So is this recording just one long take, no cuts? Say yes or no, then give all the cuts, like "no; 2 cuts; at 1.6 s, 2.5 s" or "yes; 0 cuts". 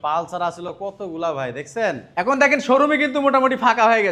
yes; 0 cuts